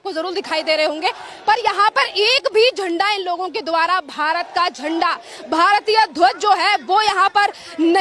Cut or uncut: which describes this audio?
uncut